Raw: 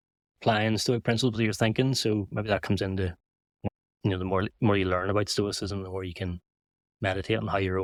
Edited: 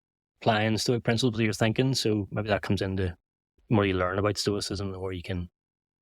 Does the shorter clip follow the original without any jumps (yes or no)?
no